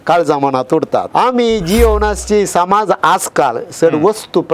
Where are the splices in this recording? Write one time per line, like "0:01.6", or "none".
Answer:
0:01.1